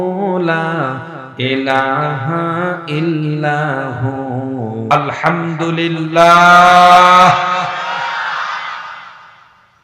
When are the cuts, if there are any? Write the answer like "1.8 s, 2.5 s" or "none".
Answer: 4.9 s